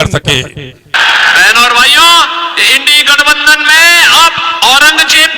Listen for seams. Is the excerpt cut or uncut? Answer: cut